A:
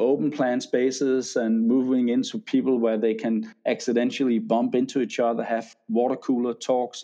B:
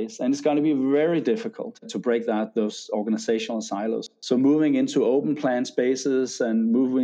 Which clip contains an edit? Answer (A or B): B